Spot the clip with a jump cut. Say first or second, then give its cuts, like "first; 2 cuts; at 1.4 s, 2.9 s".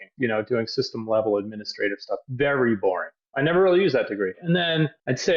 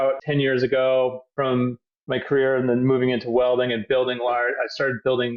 first; 2 cuts; at 3.1 s, 4.4 s